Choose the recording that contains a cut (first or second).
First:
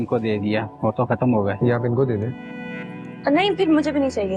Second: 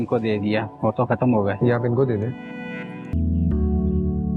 second